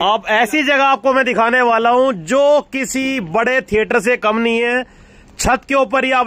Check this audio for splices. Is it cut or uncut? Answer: uncut